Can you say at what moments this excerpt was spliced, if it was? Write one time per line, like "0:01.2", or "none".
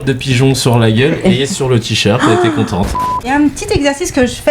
0:03.3